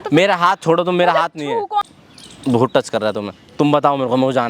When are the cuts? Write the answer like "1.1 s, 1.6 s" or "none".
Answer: 1.9 s